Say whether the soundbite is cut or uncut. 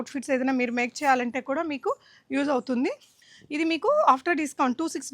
cut